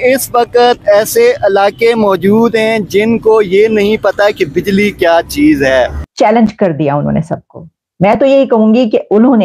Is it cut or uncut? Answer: cut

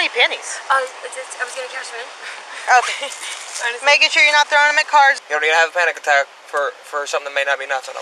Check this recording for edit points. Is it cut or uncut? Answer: cut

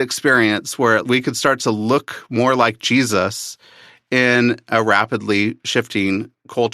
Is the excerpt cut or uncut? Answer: cut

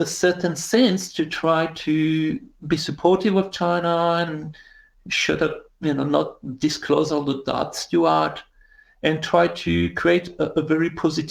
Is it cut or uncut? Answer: uncut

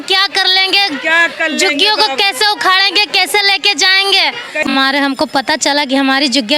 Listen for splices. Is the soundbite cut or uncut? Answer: cut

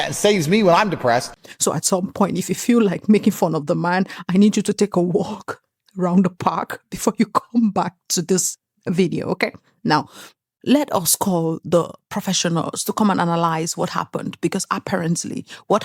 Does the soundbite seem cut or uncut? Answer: uncut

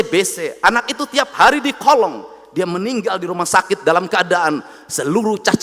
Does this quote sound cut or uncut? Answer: uncut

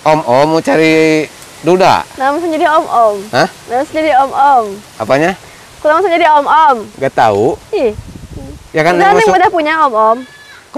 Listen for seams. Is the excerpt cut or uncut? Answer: uncut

